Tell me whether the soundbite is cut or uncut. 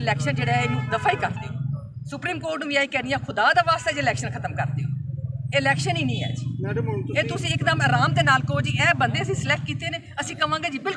uncut